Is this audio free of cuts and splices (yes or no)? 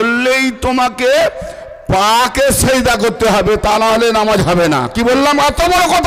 yes